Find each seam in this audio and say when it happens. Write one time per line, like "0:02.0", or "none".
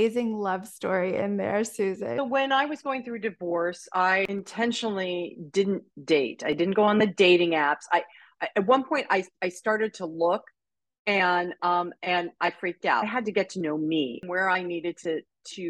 0:02.2
0:04.3
0:13.0
0:14.2